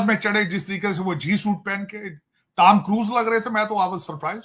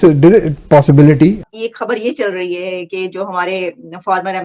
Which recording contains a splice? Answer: second; 1 cut; at 1.5 s

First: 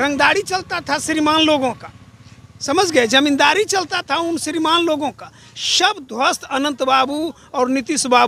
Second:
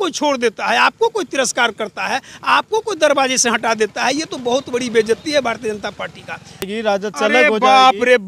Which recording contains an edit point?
second; 1 cut; at 6.7 s

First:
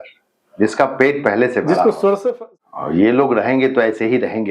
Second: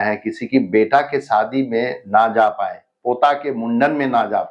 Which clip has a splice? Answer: first; 1 cut; at 2.5 s

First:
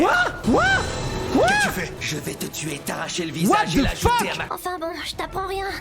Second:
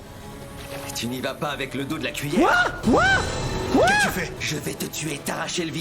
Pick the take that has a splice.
first; 1 cut; at 4.5 s

